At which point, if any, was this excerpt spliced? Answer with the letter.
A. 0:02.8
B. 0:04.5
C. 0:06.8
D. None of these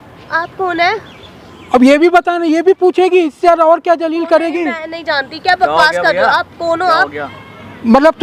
D